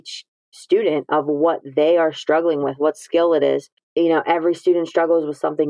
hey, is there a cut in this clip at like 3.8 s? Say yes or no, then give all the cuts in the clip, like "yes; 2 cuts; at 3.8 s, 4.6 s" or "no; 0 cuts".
yes; 1 cut; at 3.8 s